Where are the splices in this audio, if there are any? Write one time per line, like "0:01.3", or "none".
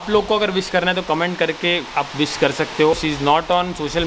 none